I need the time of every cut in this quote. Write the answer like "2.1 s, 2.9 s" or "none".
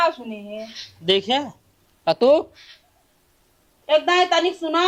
none